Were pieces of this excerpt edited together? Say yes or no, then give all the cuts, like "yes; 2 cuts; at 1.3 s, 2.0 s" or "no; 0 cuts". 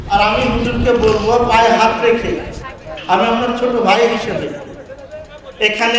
no; 0 cuts